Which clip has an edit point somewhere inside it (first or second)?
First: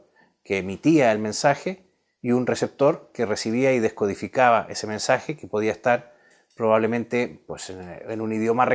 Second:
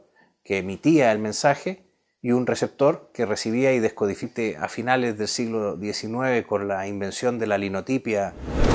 first